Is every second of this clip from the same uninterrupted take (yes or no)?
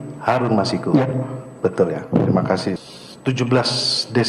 no